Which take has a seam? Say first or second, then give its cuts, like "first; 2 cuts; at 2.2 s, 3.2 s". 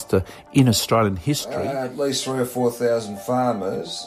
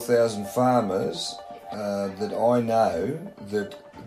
first; 1 cut; at 1.4 s